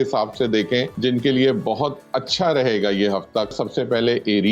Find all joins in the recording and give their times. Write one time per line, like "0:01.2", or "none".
0:00.9
0:03.5